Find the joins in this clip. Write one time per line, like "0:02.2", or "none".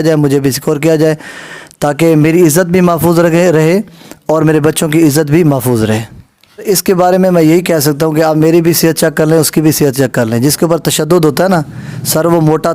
none